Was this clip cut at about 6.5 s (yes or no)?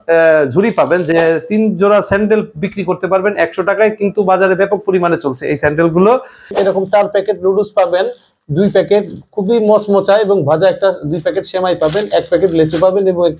yes